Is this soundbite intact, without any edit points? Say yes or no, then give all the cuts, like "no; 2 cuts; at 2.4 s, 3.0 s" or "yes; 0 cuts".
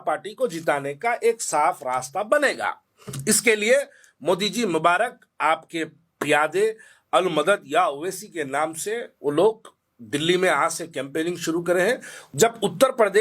no; 1 cut; at 12.1 s